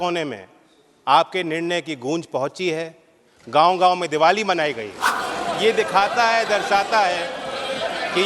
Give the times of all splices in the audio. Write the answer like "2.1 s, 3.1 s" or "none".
5.2 s